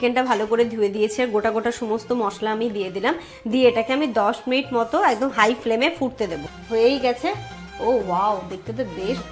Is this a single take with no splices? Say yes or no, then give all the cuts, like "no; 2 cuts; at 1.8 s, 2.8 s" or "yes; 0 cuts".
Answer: no; 1 cut; at 6.5 s